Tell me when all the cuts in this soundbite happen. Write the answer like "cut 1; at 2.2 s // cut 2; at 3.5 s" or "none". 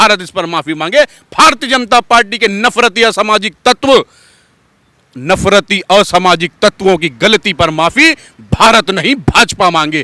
none